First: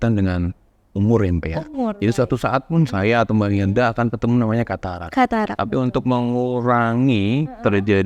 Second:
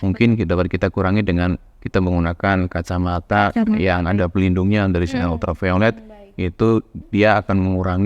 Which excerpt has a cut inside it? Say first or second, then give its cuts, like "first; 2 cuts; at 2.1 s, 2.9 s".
second; 1 cut; at 7.0 s